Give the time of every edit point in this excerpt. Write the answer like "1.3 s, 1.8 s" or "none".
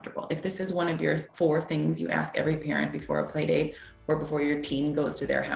1.3 s